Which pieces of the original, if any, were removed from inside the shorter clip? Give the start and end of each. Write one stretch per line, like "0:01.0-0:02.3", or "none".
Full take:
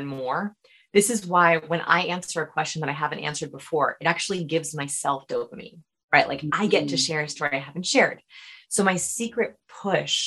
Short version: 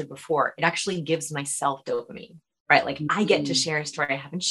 none